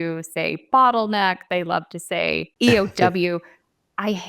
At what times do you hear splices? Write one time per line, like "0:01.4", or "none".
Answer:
0:02.5

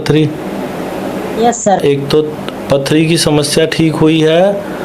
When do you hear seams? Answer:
0:01.8

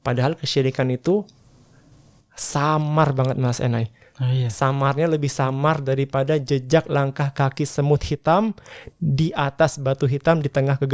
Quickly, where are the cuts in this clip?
none

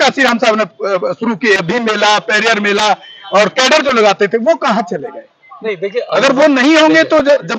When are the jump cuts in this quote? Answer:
0:01.6

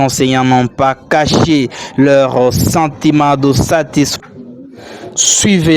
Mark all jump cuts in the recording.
0:04.1

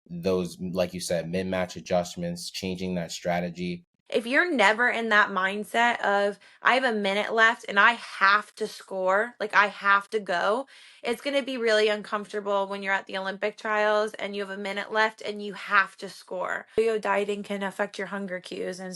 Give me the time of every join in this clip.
0:03.9
0:16.8

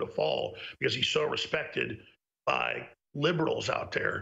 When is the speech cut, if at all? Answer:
none

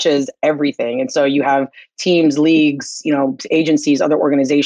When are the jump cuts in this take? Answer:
none

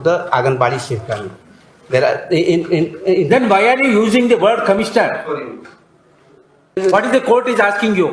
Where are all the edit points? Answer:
0:06.8

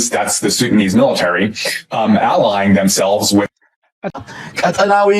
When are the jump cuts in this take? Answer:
0:04.1

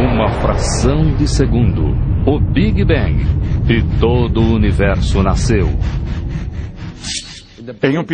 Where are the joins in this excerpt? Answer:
0:05.7

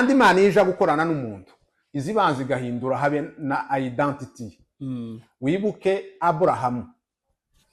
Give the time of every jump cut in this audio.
none

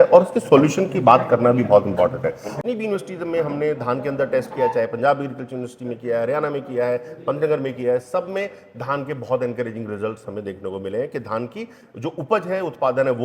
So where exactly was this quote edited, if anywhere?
0:02.5

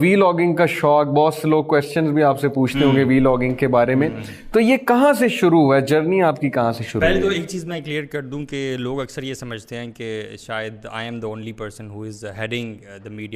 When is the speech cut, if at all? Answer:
none

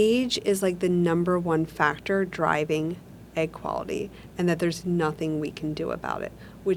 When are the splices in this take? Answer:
none

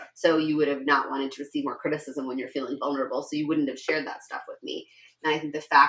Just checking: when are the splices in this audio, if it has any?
none

